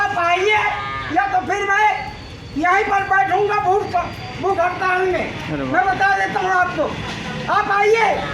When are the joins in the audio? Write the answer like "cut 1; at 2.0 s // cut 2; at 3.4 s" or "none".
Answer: none